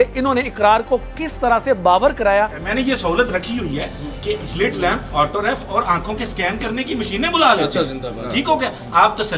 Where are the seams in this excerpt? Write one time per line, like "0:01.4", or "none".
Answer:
0:02.6